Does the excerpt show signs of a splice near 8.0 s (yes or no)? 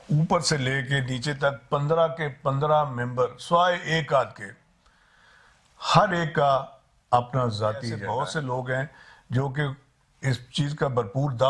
yes